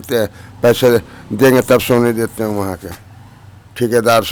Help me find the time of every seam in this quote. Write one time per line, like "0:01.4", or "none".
none